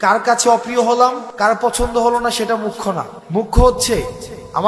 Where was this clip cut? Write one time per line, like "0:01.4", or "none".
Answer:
0:01.3
0:03.1